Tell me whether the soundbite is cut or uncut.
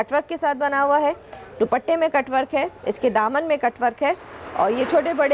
uncut